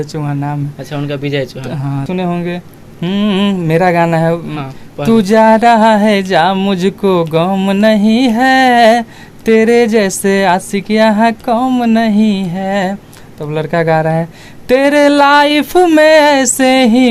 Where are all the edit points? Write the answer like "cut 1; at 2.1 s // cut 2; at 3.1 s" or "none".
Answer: cut 1; at 2.0 s